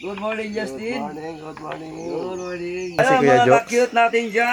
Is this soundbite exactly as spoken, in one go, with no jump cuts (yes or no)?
no